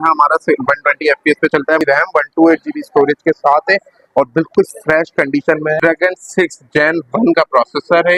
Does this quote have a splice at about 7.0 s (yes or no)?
no